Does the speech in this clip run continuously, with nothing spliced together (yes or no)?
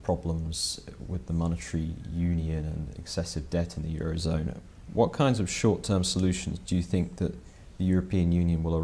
yes